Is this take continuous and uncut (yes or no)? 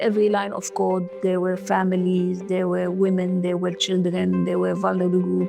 yes